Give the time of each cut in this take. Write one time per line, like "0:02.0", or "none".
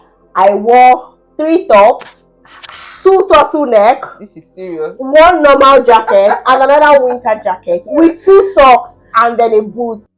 none